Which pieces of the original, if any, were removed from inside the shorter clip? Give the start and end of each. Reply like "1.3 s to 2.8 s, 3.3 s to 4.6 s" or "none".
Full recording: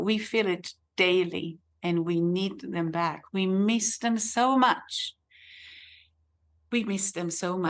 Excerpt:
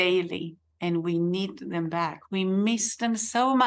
none

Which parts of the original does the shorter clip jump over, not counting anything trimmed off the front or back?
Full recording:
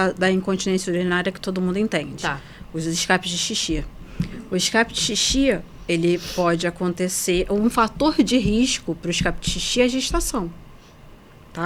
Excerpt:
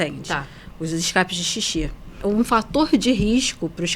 4.1 s to 7.5 s

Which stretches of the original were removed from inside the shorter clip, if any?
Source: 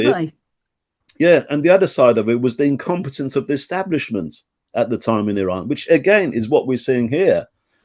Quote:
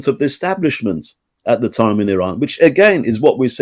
none

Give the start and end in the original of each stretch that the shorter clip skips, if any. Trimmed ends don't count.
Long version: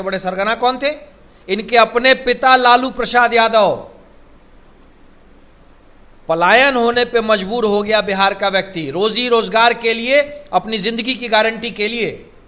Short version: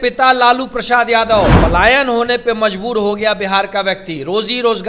3.8 s to 6.2 s

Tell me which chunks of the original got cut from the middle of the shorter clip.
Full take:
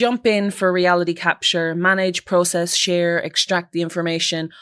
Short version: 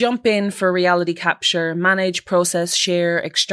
none

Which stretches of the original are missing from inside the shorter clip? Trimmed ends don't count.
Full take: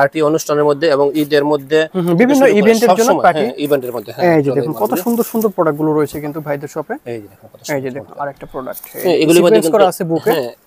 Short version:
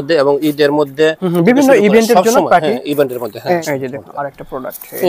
4.3 s to 7.6 s

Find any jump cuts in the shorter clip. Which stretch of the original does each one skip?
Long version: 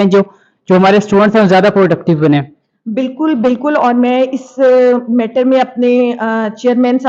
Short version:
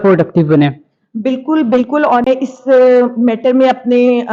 4.0 s to 4.2 s

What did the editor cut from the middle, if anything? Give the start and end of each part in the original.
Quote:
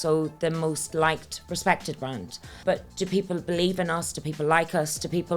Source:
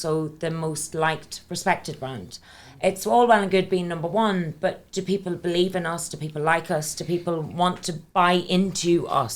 2.6 s to 4.5 s

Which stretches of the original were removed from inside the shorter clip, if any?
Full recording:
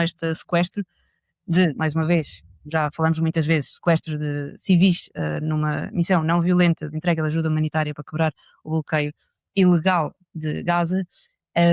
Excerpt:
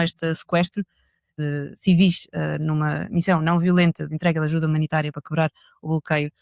1.3 s to 4.1 s

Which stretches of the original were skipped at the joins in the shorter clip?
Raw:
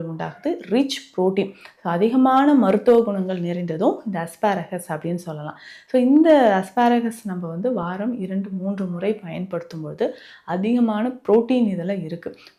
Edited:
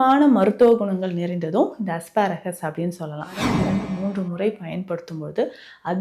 5.6 s to 8.0 s

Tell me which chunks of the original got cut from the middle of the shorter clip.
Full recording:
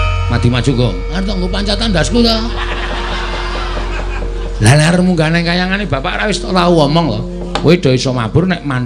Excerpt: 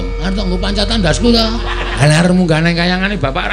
2.9 s to 4.7 s

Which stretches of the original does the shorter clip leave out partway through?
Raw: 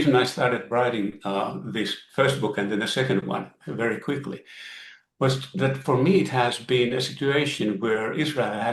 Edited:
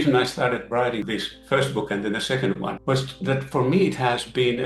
1.0 s to 1.7 s, 3.5 s to 5.1 s

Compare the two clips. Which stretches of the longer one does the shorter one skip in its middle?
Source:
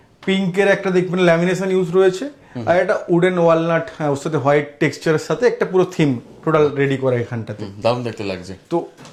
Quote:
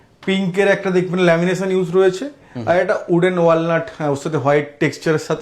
none

